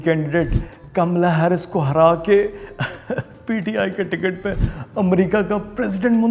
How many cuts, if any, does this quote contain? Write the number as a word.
zero